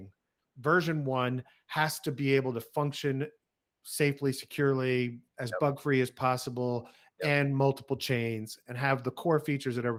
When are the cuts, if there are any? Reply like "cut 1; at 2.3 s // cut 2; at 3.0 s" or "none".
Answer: none

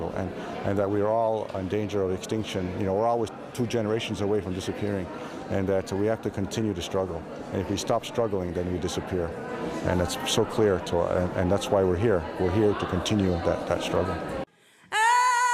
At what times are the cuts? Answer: cut 1; at 5.4 s

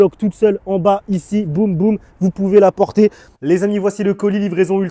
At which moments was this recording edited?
cut 1; at 3.3 s

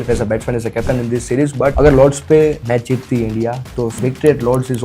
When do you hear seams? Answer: cut 1; at 1.7 s // cut 2; at 2.6 s // cut 3; at 4.0 s

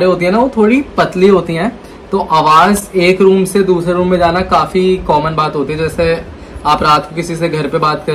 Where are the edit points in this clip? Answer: none

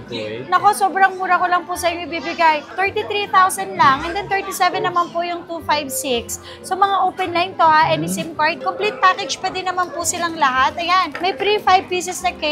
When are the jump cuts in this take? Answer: none

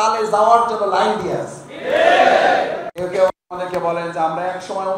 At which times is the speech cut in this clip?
cut 1; at 2.9 s

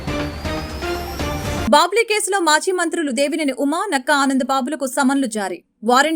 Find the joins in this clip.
cut 1; at 1.6 s

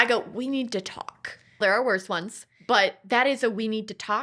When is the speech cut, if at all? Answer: cut 1; at 1.6 s

